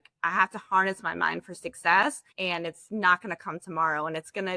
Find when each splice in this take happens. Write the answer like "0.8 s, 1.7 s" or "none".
2.3 s